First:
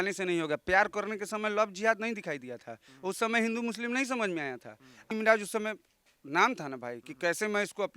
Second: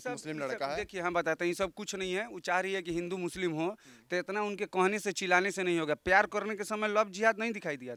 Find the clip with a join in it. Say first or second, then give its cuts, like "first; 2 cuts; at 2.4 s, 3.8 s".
first; 1 cut; at 5.1 s